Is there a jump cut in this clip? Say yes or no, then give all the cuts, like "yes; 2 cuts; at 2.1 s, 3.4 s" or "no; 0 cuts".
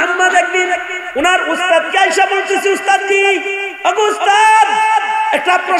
yes; 2 cuts; at 1.0 s, 3.6 s